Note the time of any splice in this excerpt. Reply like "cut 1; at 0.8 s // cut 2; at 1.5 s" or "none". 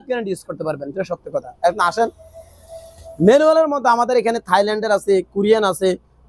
none